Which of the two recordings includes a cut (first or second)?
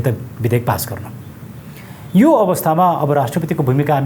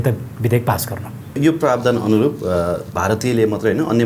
second